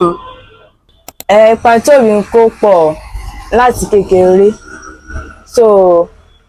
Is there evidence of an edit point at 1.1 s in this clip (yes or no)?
yes